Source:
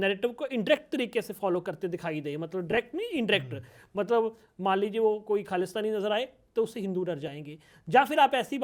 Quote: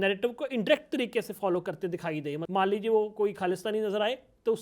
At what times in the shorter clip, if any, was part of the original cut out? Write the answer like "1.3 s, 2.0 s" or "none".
2.4 s

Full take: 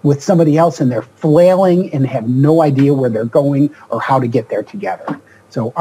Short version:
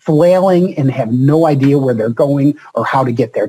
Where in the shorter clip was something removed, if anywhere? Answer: none

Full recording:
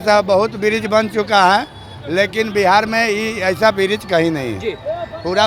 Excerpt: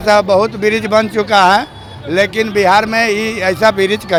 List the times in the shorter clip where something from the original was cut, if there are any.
none

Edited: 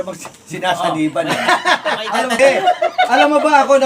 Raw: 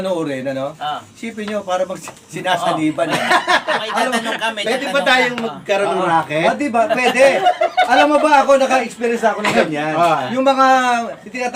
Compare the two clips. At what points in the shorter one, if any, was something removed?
2.4 s

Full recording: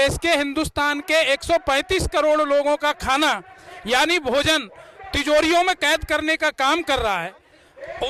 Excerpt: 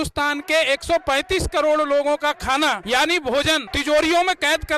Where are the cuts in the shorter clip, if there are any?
2.8 s, 3.7 s

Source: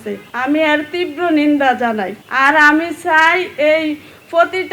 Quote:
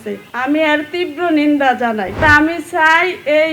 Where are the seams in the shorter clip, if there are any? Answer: 2.2 s

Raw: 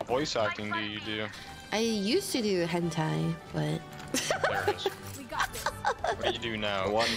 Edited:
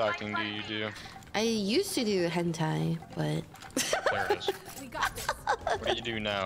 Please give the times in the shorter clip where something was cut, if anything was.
none

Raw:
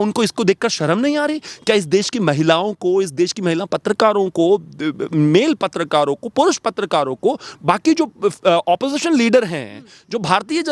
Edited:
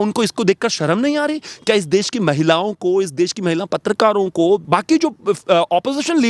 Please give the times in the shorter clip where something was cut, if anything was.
4.6 s

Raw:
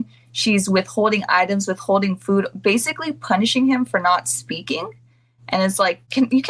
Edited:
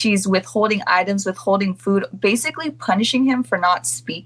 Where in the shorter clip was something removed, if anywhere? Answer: none

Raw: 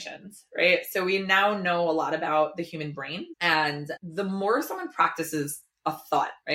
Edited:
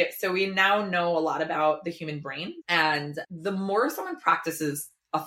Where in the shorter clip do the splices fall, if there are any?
none

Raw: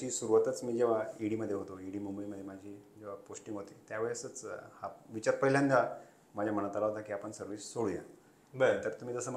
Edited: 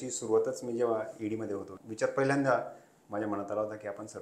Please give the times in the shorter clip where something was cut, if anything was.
1.8 s

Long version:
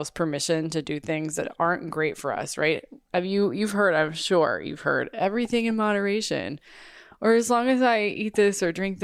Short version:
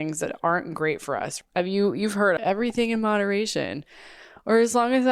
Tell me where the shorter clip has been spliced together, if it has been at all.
1.3 s, 2.4 s

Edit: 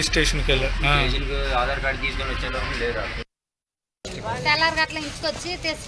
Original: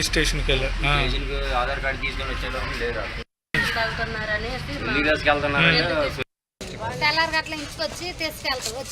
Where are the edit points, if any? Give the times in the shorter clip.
3.6 s

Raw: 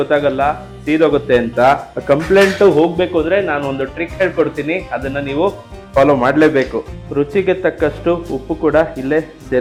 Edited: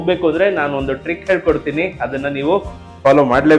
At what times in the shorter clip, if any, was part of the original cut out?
none

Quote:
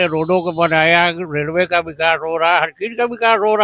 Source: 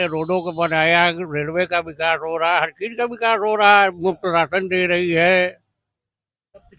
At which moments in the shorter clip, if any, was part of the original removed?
none

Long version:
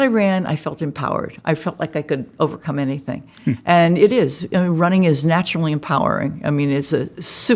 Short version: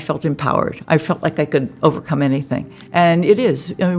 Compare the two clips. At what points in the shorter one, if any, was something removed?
2.8 s

